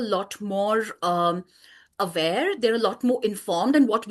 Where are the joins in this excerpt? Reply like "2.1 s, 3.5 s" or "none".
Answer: none